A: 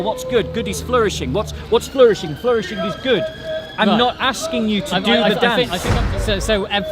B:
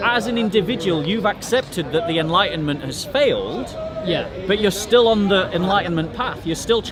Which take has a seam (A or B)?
A